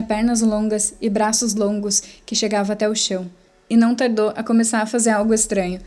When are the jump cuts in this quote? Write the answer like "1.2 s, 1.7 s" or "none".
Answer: none